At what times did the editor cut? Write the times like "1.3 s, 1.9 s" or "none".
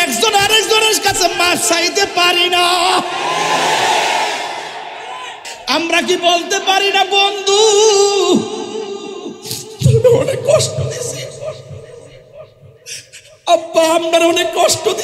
5.5 s